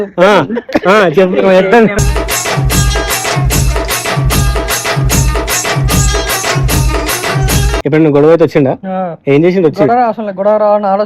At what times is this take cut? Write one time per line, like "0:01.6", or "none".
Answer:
0:07.7